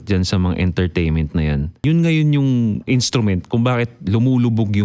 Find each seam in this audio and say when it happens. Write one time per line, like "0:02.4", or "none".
0:01.8
0:02.8